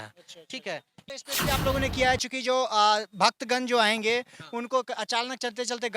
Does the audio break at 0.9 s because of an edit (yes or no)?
yes